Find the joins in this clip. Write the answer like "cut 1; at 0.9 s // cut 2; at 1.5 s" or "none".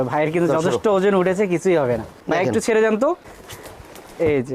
cut 1; at 2.2 s